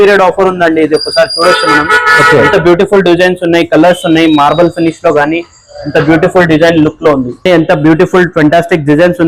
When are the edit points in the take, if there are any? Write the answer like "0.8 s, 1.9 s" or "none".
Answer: 7.4 s